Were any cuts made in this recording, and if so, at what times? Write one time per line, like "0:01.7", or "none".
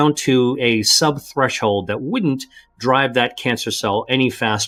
none